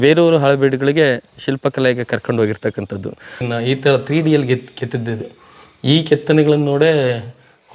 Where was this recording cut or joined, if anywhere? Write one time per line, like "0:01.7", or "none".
0:03.4